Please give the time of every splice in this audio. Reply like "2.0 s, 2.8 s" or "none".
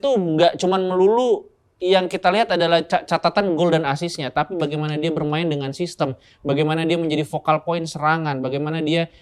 none